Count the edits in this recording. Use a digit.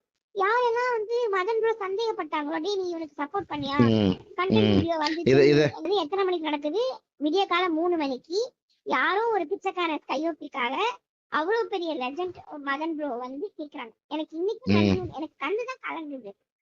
1